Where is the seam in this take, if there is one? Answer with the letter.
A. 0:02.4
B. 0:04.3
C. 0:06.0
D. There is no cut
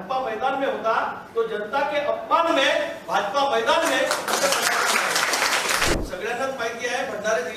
C